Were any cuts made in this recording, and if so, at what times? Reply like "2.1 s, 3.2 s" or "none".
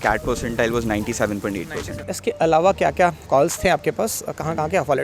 2.1 s